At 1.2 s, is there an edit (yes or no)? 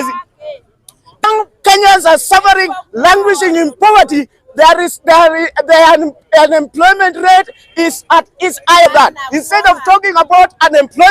yes